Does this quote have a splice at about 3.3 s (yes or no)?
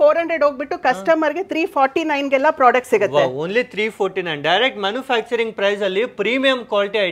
no